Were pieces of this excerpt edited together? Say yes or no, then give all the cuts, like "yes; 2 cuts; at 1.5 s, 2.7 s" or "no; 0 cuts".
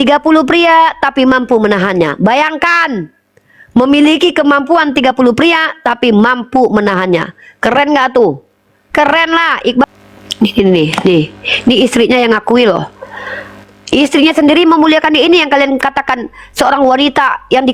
yes; 1 cut; at 9.8 s